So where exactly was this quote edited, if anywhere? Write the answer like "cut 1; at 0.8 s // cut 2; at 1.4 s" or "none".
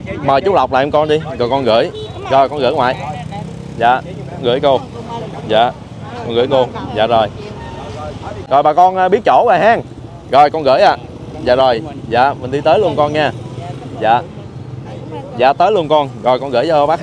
cut 1; at 8.3 s